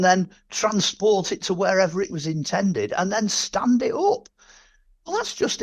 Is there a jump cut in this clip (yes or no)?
no